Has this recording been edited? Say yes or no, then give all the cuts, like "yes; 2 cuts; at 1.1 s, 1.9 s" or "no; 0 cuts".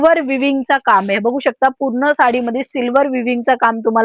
no; 0 cuts